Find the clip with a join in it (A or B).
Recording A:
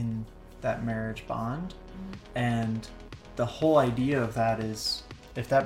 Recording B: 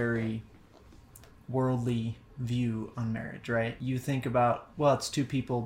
B